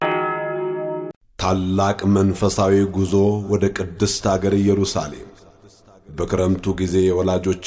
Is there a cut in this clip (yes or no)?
yes